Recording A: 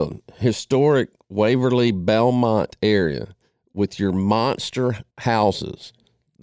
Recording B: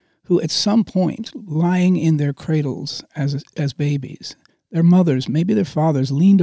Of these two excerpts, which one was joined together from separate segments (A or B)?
A